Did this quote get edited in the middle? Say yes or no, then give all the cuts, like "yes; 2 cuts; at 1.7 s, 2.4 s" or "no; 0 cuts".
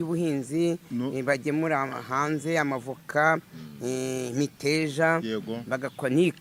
no; 0 cuts